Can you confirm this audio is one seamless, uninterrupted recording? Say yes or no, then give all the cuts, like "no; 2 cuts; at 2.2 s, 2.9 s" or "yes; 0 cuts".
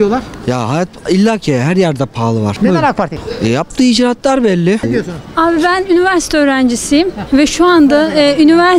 no; 3 cuts; at 2.5 s, 3.2 s, 4.8 s